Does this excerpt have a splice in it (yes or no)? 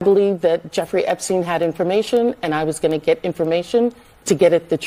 no